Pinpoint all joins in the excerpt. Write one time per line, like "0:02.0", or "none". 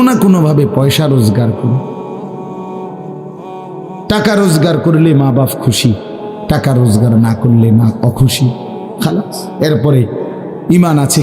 0:02.4
0:04.1

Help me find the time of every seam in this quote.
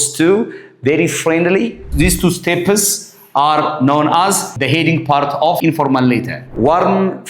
0:01.8
0:04.5
0:05.6
0:06.4

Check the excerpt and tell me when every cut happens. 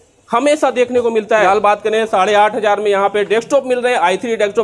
0:01.4

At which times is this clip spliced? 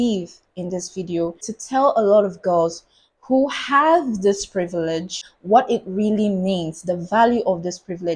0:01.5
0:05.2

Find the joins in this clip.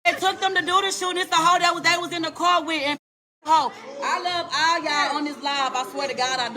0:03.8

